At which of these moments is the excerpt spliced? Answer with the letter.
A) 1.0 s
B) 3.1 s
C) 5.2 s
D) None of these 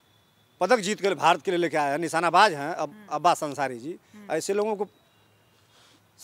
D